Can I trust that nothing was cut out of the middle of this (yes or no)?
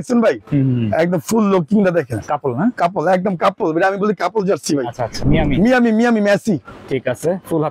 no